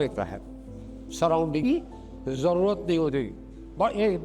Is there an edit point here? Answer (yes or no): yes